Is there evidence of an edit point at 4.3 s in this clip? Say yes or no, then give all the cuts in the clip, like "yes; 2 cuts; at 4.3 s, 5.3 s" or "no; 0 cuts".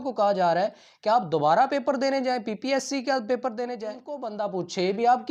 yes; 1 cut; at 4.3 s